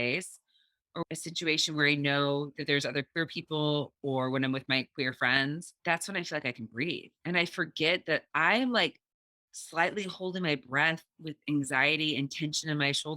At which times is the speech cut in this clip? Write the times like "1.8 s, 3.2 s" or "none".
1.0 s, 5.7 s